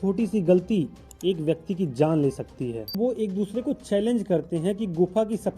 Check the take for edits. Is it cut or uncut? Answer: cut